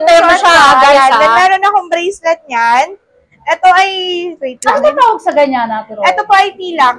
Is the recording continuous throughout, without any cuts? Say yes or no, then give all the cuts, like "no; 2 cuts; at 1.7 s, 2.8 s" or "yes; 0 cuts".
yes; 0 cuts